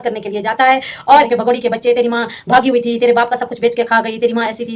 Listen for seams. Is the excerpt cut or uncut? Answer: cut